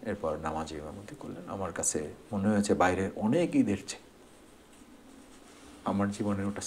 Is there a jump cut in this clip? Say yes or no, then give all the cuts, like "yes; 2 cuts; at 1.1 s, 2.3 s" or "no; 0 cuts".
no; 0 cuts